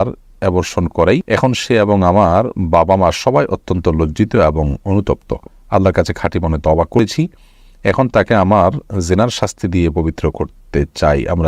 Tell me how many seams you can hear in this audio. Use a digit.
2